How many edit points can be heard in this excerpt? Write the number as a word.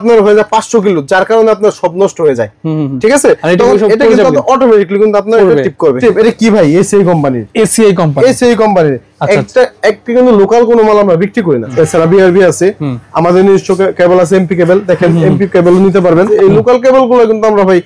three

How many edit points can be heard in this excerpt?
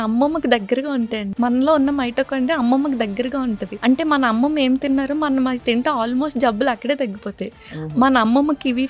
one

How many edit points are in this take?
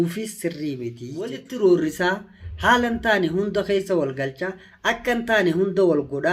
one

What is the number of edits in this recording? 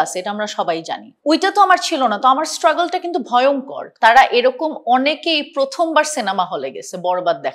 two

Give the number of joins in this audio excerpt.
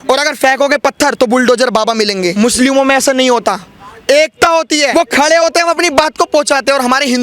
two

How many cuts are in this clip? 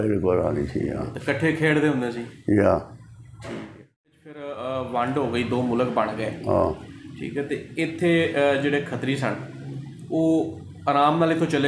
one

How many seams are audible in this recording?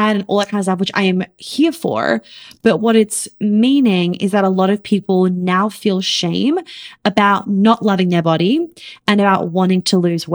zero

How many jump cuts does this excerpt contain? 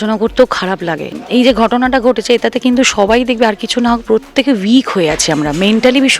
one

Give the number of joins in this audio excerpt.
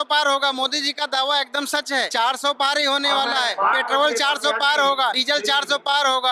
three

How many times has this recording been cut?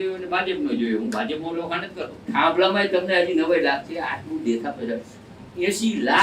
one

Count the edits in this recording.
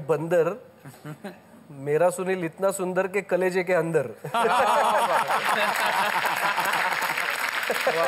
zero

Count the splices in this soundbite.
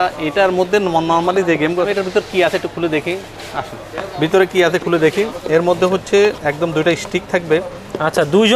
one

